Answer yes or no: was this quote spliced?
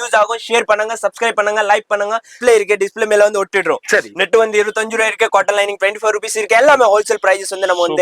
yes